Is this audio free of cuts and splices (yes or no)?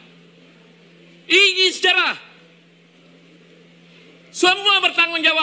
no